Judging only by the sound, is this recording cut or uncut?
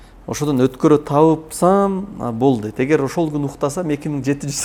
uncut